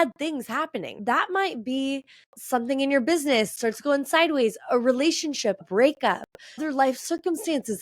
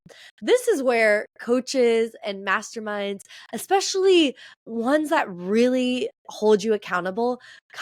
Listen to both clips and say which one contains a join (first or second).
first